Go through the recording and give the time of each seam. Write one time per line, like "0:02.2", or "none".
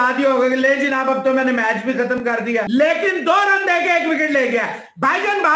0:02.6